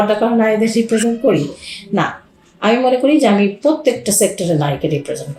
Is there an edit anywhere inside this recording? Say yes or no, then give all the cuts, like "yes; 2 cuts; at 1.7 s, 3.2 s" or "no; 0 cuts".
no; 0 cuts